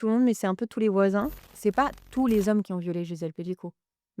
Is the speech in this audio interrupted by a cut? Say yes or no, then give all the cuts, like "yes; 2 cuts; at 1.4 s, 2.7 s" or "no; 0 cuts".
yes; 1 cut; at 1.4 s